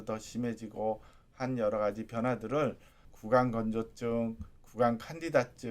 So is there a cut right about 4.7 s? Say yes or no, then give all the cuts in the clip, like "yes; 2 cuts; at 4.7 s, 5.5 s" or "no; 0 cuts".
no; 1 cut; at 3.1 s